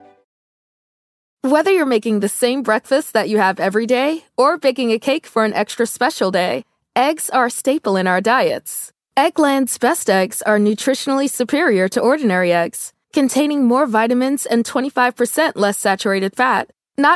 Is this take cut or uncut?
uncut